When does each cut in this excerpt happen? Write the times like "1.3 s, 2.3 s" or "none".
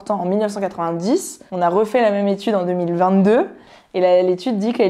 1.4 s